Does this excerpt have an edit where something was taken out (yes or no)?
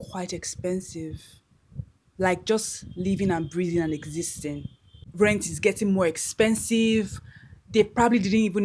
yes